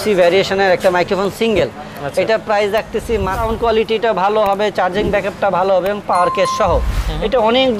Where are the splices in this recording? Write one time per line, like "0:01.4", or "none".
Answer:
0:03.4